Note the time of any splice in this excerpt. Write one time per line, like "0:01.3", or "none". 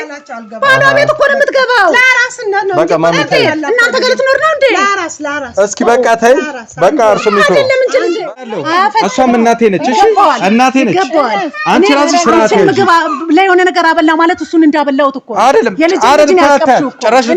0:08.4